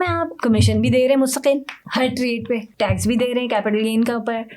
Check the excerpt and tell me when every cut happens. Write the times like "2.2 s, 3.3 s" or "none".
2.7 s